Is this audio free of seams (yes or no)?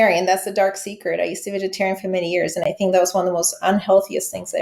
yes